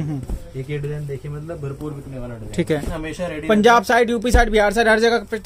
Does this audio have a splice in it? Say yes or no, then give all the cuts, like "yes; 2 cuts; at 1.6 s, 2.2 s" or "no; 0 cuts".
yes; 1 cut; at 3.0 s